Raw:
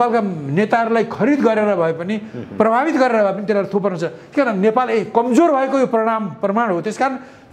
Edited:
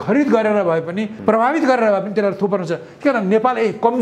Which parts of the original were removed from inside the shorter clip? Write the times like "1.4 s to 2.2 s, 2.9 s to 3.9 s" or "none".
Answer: 2.2 s to 2.4 s